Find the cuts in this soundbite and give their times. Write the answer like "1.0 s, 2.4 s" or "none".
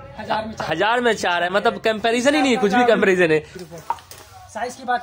3.6 s